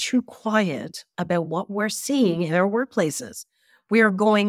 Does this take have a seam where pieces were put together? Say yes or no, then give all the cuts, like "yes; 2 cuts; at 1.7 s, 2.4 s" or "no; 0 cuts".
no; 0 cuts